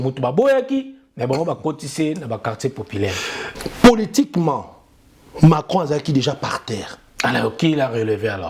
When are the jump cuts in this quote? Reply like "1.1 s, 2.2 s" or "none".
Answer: 3.5 s